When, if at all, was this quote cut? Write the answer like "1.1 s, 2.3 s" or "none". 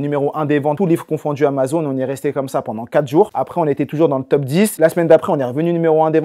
none